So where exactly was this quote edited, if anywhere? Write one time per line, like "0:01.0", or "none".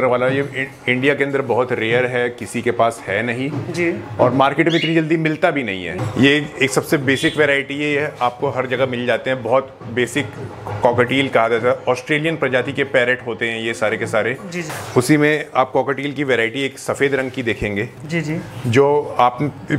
0:05.9
0:14.7